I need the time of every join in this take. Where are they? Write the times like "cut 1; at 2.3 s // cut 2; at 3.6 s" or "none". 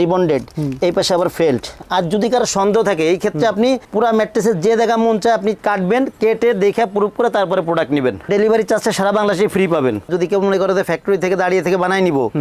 cut 1; at 1.7 s // cut 2; at 10.1 s